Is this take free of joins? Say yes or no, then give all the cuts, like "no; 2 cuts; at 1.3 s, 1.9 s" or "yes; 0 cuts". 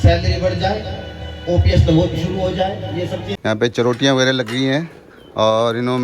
no; 1 cut; at 3.3 s